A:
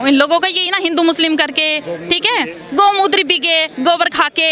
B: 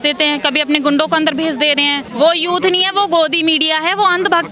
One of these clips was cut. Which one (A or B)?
B